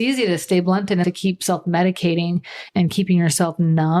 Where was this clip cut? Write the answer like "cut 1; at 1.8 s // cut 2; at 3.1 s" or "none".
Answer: cut 1; at 1.0 s // cut 2; at 2.6 s